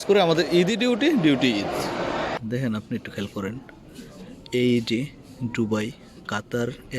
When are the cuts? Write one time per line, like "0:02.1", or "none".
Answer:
0:02.4